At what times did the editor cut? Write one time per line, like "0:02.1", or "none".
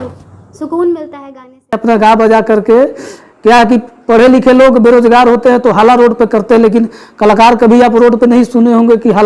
0:01.8